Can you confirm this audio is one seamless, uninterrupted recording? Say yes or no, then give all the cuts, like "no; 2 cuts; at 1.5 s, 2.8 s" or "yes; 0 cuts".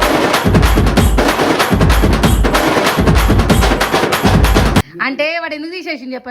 no; 1 cut; at 4.9 s